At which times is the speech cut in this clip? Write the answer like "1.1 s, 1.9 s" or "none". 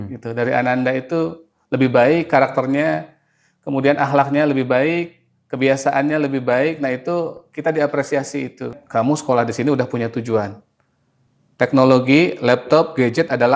8.7 s